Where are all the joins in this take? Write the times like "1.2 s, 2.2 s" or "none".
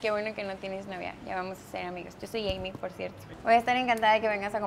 3.3 s